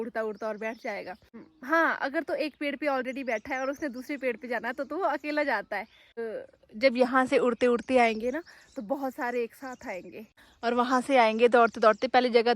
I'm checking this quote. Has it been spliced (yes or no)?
yes